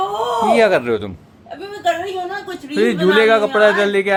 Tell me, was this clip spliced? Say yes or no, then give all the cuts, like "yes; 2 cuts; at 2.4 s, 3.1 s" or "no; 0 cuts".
no; 0 cuts